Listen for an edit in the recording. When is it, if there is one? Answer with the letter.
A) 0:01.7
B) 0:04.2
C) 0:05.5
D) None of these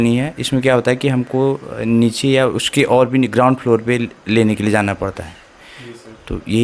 D